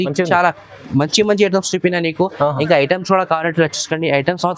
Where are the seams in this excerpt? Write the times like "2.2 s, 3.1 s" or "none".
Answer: none